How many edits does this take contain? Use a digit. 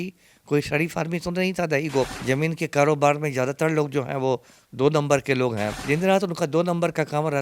2